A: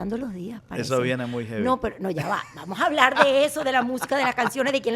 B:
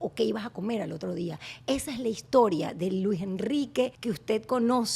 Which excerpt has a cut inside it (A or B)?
B